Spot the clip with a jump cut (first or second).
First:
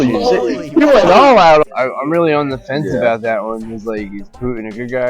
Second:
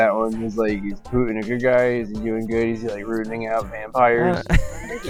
first